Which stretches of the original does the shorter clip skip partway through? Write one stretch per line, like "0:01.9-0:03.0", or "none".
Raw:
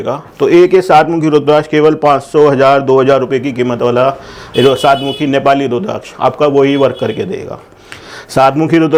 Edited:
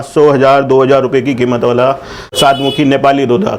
0:04.5-0:04.8